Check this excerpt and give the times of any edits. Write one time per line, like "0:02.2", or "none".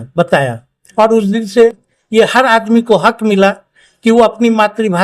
none